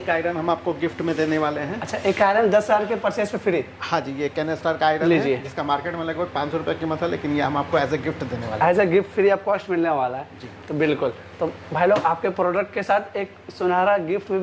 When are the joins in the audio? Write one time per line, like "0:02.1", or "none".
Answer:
none